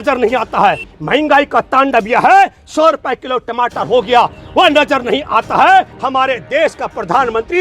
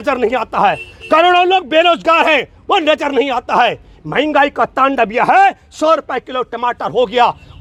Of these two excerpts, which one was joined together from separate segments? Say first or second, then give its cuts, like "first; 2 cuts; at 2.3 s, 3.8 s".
first; 2 cuts; at 0.9 s, 5.9 s